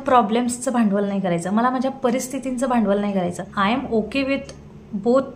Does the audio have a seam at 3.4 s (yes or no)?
yes